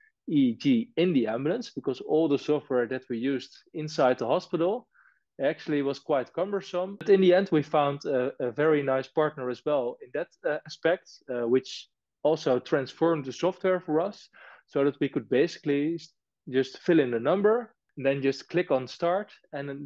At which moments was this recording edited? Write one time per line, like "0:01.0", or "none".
0:07.0
0:17.8